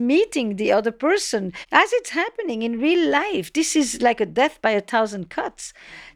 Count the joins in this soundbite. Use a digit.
1